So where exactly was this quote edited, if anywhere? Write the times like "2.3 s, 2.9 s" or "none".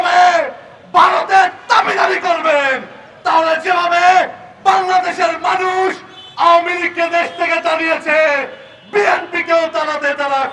none